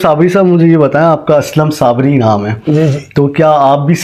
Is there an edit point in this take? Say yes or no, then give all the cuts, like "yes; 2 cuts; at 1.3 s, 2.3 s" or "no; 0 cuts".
no; 0 cuts